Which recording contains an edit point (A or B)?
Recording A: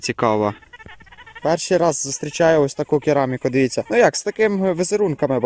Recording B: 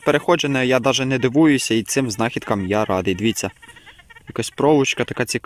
A